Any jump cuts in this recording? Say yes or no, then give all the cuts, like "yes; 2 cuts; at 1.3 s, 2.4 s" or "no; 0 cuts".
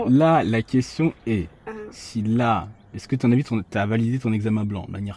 no; 0 cuts